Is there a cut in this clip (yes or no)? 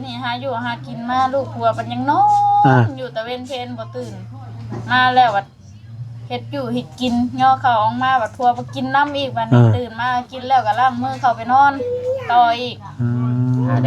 no